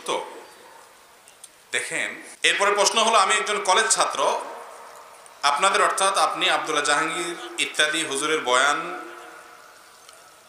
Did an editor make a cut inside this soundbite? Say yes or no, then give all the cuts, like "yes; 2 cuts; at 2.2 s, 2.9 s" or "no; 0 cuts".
yes; 1 cut; at 2.3 s